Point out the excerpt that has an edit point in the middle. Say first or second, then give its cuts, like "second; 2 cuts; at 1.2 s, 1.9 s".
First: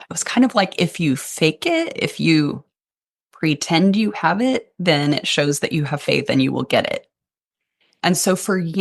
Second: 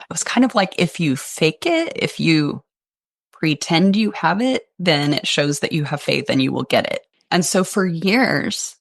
second; 1 cut; at 7.1 s